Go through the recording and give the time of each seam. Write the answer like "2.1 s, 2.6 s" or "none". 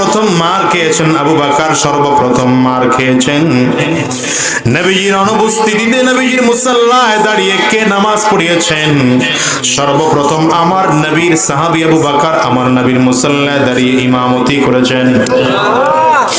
none